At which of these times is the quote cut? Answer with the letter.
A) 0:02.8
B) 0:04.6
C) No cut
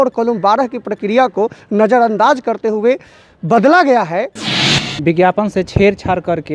B